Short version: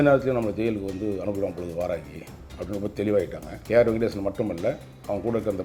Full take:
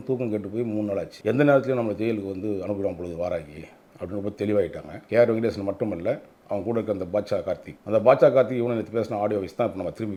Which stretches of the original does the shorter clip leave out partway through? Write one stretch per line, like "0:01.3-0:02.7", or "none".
none

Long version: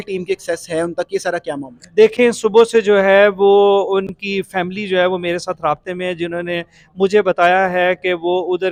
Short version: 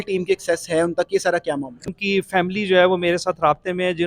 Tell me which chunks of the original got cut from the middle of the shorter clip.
0:01.9-0:04.1

